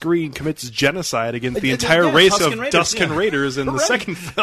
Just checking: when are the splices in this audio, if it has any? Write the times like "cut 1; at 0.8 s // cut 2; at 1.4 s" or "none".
none